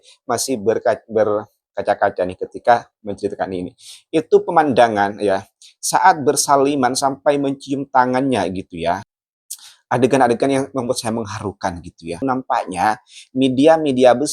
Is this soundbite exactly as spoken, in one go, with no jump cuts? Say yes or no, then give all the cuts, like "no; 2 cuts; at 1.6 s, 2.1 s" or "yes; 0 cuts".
no; 2 cuts; at 9.1 s, 12.2 s